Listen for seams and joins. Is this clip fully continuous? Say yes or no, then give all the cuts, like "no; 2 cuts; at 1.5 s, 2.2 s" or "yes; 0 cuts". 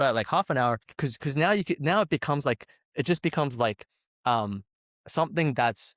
no; 1 cut; at 0.9 s